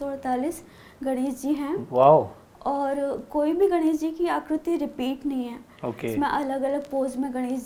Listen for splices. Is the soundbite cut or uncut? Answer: uncut